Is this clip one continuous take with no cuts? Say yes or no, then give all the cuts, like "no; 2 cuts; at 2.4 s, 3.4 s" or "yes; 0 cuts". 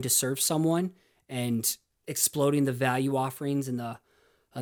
yes; 0 cuts